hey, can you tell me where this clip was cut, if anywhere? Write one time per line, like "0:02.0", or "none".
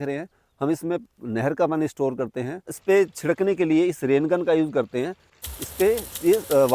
0:02.7
0:05.4